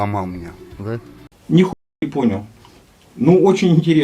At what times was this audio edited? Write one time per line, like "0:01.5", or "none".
0:01.2